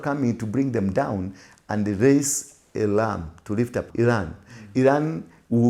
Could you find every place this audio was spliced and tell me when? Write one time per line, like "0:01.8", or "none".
0:03.9